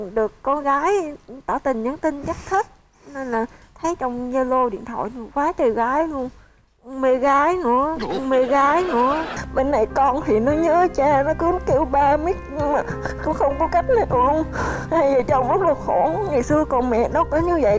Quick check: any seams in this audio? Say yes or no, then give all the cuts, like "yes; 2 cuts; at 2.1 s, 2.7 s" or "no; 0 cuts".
yes; 1 cut; at 9.3 s